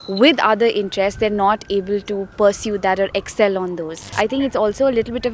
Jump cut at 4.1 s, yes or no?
yes